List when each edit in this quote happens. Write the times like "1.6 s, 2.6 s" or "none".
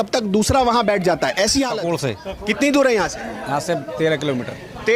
1.8 s